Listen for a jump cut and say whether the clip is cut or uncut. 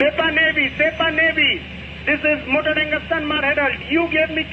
uncut